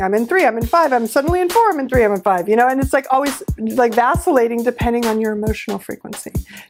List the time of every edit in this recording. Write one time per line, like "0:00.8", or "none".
none